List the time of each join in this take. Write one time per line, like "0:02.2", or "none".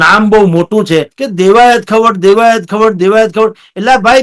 0:01.2